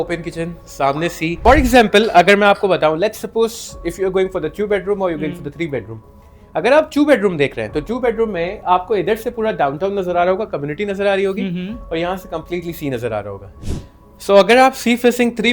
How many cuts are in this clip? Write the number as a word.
two